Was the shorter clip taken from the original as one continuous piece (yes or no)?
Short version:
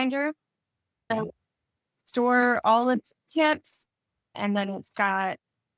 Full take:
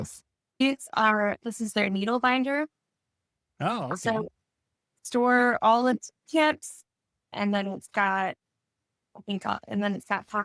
no